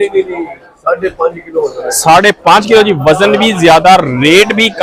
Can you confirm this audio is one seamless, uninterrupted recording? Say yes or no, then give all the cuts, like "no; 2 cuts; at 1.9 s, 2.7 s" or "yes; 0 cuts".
yes; 0 cuts